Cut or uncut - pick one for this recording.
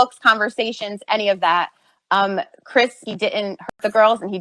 cut